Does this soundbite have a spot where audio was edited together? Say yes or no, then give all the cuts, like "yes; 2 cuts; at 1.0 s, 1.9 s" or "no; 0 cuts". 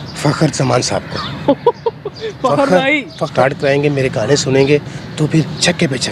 yes; 1 cut; at 3.3 s